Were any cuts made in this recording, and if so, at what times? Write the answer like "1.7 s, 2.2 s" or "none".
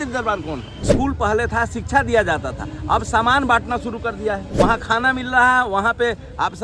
0.9 s, 4.5 s